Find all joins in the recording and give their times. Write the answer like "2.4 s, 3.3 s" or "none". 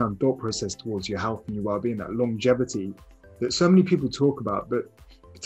none